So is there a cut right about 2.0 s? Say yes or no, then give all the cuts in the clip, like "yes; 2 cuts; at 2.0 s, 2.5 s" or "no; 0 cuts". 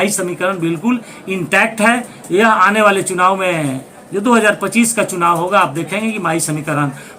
no; 0 cuts